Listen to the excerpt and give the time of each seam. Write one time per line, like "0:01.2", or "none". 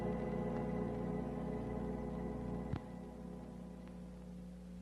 0:02.9